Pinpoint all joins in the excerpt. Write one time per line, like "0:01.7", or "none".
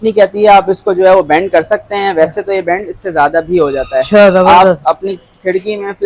none